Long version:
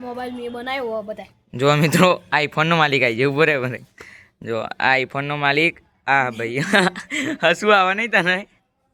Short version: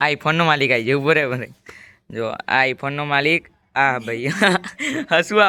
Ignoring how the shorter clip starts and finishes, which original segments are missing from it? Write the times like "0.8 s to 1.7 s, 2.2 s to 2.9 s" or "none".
none